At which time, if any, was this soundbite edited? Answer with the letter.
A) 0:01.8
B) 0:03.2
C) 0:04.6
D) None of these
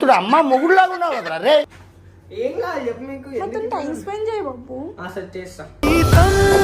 A